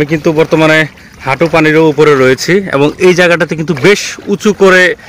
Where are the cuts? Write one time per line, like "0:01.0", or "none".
none